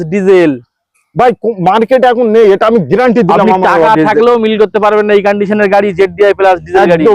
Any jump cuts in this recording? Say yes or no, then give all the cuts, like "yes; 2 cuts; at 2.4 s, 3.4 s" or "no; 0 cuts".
no; 0 cuts